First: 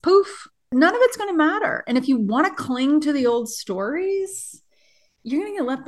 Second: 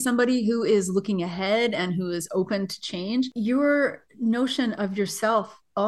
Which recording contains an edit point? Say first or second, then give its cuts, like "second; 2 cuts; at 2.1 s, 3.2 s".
second; 1 cut; at 3.3 s